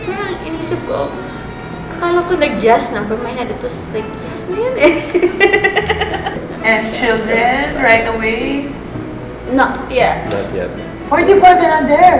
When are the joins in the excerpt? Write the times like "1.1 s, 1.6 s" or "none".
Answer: 6.4 s